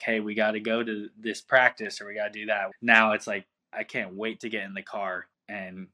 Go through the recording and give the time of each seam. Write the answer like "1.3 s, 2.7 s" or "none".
2.7 s